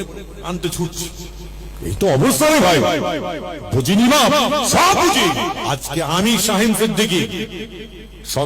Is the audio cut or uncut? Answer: cut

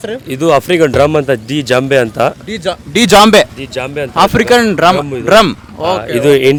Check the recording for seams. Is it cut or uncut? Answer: uncut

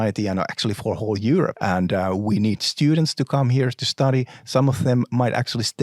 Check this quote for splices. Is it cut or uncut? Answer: cut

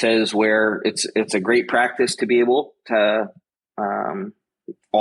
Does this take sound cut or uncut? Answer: uncut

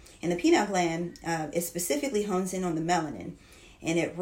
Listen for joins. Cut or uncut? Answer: uncut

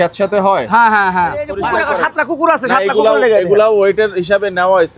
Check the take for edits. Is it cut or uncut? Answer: cut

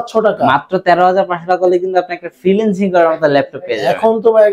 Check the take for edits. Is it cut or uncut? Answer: uncut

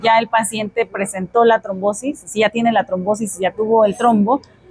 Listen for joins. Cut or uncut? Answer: uncut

